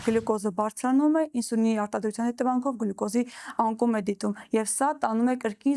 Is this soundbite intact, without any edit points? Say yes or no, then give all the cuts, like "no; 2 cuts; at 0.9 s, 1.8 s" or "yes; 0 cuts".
yes; 0 cuts